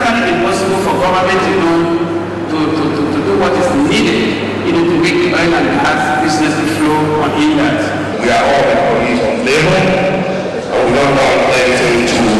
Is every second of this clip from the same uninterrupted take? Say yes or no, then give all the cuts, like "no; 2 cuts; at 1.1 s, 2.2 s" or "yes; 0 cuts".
yes; 0 cuts